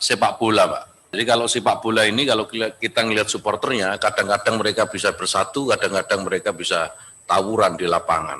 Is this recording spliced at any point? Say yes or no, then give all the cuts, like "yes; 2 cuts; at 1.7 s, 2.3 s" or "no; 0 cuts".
yes; 1 cut; at 1.2 s